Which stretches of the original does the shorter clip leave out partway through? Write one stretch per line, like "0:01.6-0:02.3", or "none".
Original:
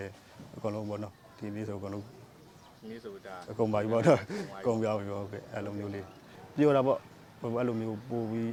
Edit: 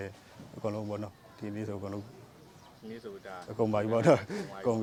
none